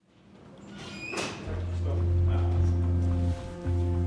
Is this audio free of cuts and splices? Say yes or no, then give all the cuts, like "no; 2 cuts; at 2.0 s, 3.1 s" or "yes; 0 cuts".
yes; 0 cuts